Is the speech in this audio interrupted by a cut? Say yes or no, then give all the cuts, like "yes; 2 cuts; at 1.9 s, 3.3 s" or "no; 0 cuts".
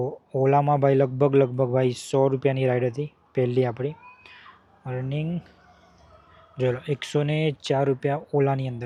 no; 0 cuts